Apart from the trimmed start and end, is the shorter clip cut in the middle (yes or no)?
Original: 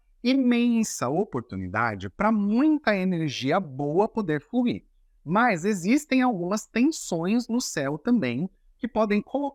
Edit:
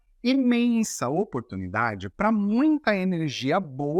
no